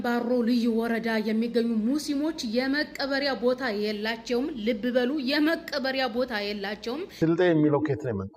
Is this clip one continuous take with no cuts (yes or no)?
no